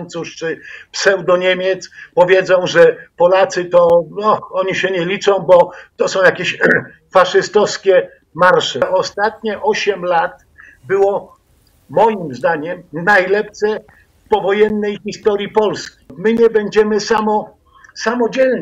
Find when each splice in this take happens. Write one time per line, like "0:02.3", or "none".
0:08.8
0:16.1